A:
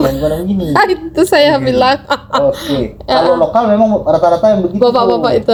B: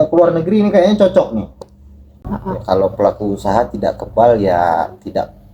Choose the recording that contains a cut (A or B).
B